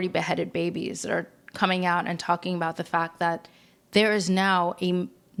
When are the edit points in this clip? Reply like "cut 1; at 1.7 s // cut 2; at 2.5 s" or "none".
none